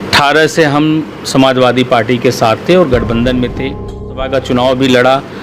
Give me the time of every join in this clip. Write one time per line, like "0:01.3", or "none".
0:04.2